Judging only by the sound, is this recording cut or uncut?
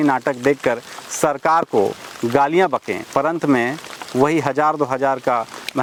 uncut